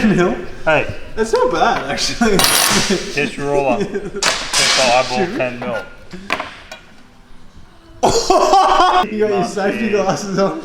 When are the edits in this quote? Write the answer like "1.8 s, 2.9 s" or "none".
9.0 s

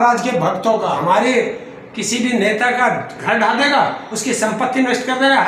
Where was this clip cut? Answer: 1.0 s

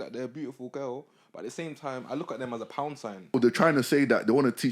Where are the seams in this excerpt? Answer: 3.3 s

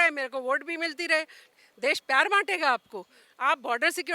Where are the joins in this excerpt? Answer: 1.4 s

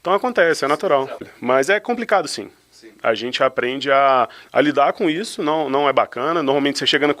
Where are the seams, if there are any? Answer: 1.3 s

